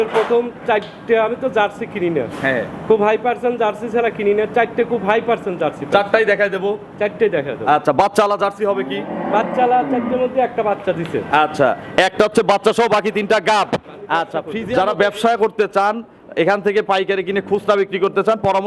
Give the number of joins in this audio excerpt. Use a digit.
1